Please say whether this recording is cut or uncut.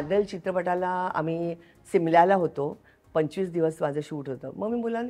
uncut